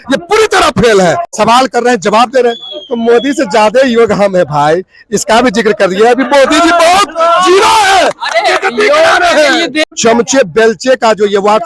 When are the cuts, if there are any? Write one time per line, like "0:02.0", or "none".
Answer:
0:01.3
0:09.8